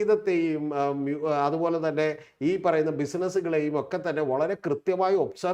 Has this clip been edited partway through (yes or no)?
no